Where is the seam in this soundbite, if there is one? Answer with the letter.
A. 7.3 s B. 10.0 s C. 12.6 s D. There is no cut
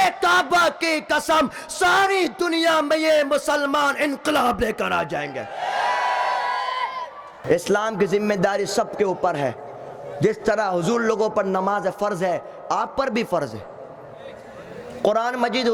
A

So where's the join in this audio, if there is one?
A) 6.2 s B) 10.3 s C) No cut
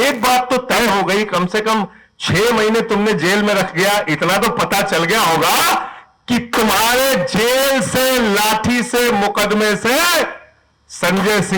C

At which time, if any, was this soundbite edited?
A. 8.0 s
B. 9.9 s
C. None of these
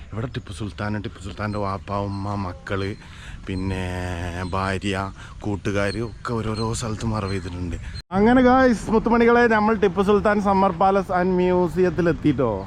A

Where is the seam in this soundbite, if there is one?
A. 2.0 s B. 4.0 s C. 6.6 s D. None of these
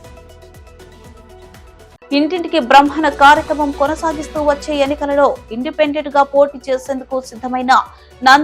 A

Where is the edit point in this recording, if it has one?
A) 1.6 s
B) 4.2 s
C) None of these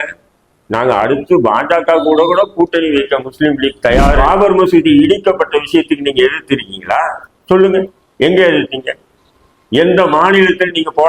B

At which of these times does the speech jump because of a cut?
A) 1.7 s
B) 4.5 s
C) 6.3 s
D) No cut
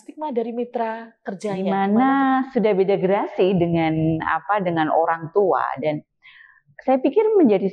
A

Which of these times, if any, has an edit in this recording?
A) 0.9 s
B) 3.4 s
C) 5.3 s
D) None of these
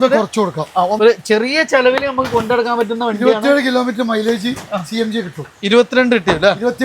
A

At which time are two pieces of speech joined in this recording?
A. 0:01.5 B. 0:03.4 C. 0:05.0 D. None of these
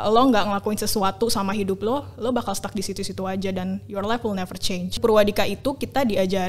C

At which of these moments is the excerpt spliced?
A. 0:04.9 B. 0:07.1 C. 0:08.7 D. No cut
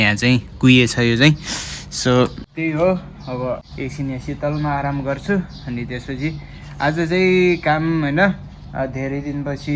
D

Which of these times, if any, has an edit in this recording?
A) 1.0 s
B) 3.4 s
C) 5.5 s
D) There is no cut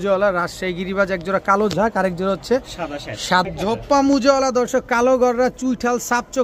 B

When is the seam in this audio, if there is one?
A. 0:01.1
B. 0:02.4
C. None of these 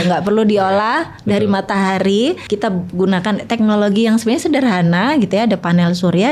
B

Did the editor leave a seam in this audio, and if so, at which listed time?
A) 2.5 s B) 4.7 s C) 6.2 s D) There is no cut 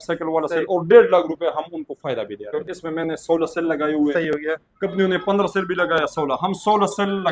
A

